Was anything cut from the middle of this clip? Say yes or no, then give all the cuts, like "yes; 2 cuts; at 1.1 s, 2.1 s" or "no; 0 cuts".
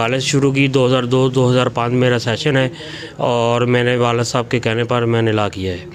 no; 0 cuts